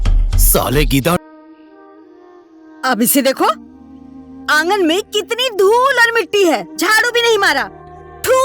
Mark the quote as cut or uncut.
cut